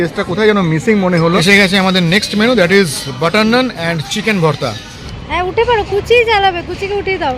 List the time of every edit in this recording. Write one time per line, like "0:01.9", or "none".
0:01.4
0:05.1